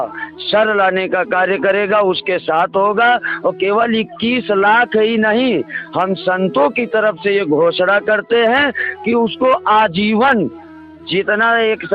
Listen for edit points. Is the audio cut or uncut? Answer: uncut